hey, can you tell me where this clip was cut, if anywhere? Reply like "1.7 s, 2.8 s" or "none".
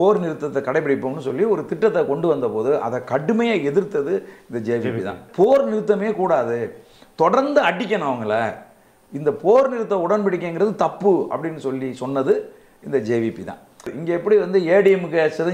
5.2 s, 13.9 s